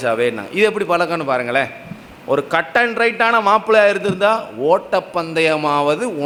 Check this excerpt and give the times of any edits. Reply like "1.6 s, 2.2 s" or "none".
none